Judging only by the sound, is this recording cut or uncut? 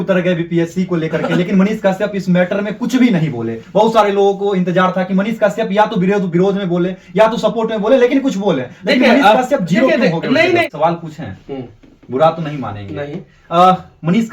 cut